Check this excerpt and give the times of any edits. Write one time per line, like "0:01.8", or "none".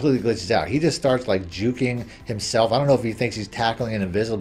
none